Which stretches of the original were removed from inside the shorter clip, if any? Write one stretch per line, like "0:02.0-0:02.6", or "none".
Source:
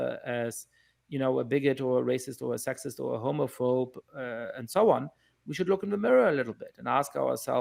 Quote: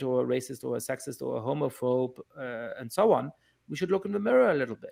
none